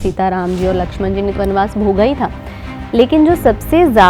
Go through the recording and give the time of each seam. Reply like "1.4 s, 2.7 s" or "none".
1.3 s